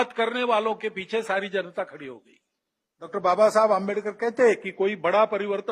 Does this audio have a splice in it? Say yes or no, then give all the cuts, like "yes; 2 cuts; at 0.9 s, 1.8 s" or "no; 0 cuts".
yes; 1 cut; at 3.1 s